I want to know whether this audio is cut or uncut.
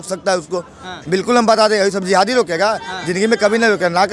uncut